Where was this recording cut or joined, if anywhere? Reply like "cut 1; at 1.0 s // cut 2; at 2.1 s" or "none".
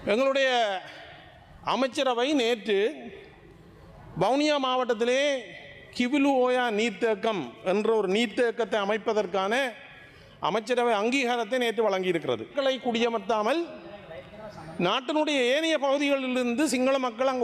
cut 1; at 12.5 s